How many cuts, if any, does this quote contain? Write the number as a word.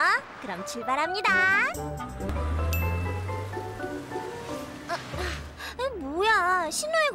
one